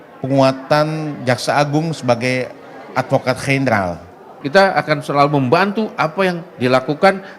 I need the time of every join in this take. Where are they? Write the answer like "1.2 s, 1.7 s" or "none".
4.3 s